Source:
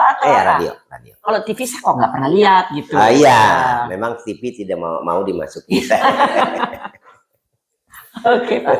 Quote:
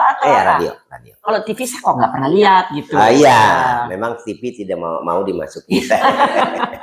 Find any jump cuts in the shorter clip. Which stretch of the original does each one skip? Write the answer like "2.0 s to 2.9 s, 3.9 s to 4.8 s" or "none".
none